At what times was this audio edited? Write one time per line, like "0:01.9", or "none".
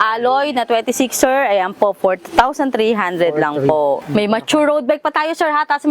0:04.0